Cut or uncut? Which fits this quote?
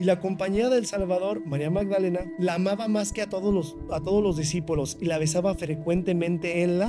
cut